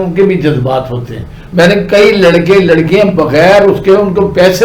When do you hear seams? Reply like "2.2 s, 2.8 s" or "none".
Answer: 1.4 s